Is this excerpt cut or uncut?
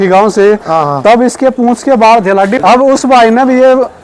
cut